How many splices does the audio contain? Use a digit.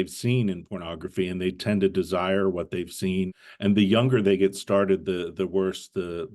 1